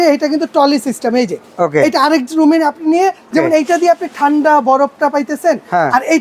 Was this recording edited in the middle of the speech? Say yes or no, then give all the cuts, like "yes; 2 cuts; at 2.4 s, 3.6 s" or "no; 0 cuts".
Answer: yes; 1 cut; at 3.3 s